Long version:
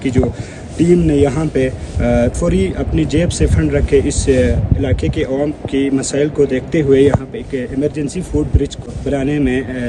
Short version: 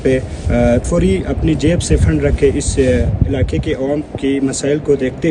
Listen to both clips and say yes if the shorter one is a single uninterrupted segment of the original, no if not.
yes